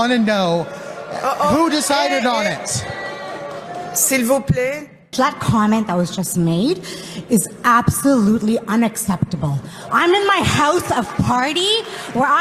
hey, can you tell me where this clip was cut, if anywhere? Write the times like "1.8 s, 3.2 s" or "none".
5.1 s